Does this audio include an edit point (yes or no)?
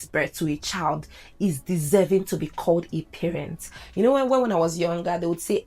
yes